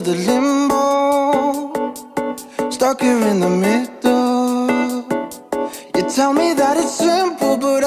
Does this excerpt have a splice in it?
yes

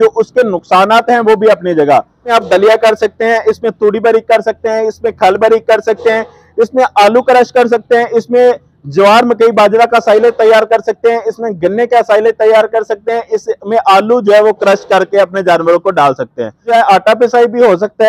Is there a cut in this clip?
yes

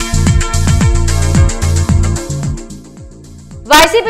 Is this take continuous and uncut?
no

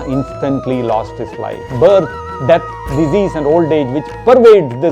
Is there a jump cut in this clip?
yes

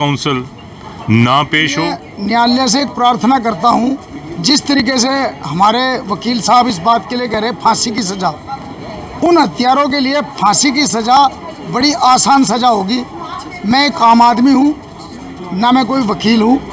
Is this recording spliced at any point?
yes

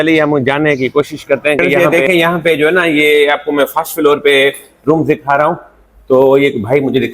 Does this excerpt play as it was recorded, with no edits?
no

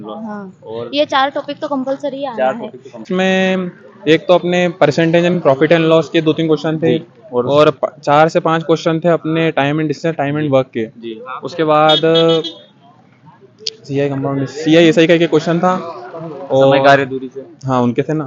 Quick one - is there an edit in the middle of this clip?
yes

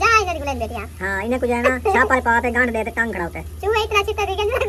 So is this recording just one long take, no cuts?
yes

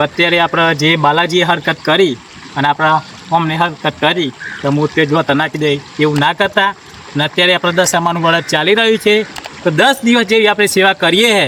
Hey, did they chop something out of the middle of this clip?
no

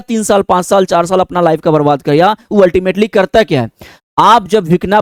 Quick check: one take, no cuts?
yes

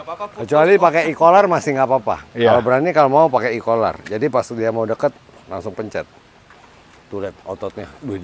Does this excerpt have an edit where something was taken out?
no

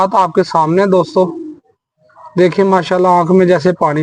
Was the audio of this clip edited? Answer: no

